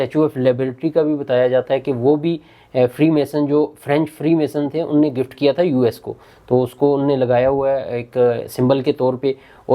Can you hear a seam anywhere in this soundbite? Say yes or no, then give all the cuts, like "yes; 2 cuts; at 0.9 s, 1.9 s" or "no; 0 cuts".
no; 0 cuts